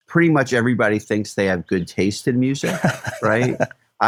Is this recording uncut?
yes; 0 cuts

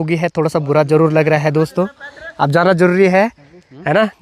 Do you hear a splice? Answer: no; 0 cuts

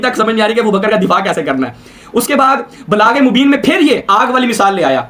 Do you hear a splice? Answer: no; 0 cuts

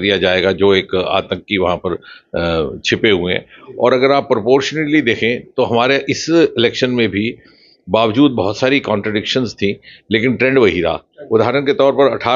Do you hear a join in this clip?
yes; 1 cut; at 3.5 s

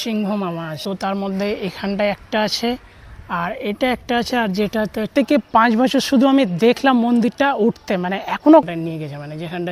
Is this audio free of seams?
no; 3 cuts; at 0.8 s, 5.1 s, 8.7 s

